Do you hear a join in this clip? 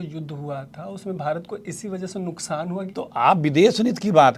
yes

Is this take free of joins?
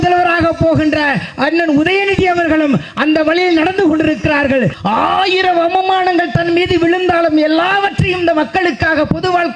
no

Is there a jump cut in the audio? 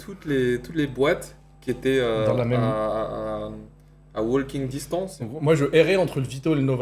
yes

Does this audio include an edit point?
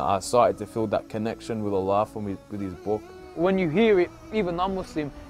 yes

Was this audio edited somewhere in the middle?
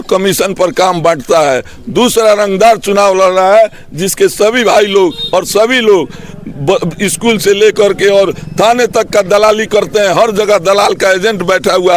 no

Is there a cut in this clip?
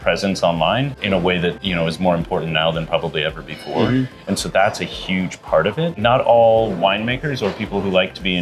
yes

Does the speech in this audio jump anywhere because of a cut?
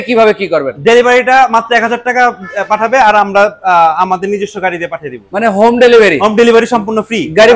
no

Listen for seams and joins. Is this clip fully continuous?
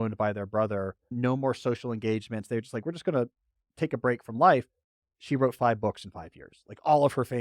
no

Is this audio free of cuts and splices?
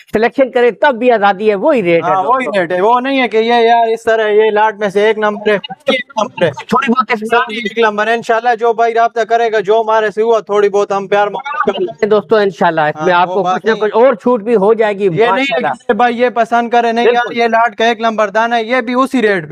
yes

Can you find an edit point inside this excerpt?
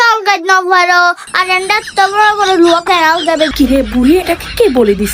yes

